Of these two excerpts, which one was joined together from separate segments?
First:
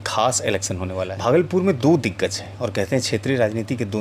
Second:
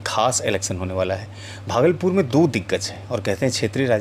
first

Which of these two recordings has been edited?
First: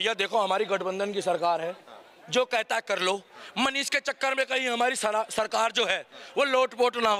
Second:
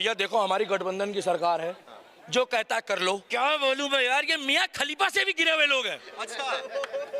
second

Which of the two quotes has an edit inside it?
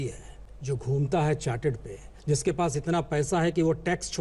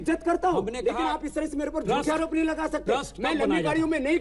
first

